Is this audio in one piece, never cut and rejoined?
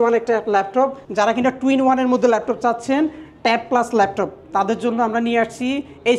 no; 1 cut; at 1.0 s

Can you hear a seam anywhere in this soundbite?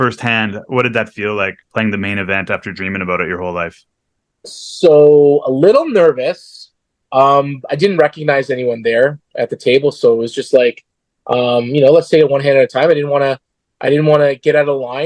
yes; 1 cut; at 1.6 s

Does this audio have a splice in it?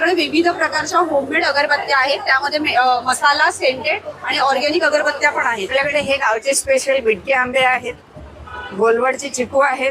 yes; 1 cut; at 5.7 s

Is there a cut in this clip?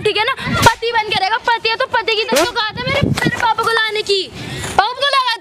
yes; 1 cut; at 2.3 s

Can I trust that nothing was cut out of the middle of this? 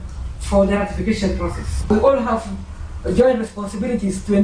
no; 1 cut; at 1.9 s

